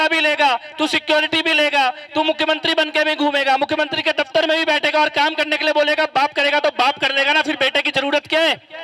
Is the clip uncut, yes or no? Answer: yes